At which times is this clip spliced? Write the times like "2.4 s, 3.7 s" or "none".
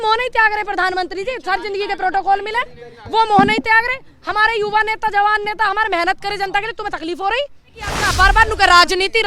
8.0 s